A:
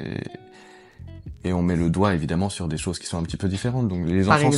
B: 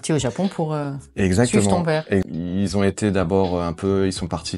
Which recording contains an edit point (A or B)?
B